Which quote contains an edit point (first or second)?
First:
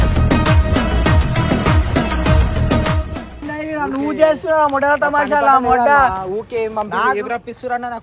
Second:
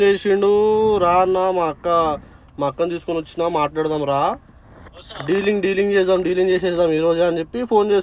first